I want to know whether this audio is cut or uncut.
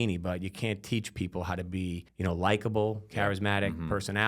cut